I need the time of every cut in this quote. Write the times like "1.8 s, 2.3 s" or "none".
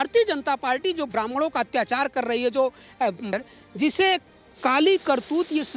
3.3 s